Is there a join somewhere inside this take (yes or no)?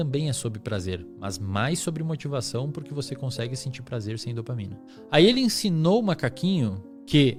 no